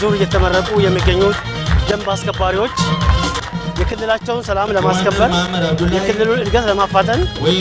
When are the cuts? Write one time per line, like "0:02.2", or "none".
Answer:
0:03.4